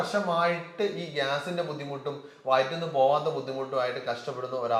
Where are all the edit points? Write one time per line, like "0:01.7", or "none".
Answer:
none